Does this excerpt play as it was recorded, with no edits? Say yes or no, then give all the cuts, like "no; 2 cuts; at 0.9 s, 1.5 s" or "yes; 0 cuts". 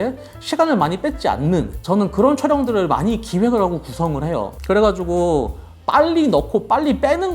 no; 2 cuts; at 1.8 s, 4.5 s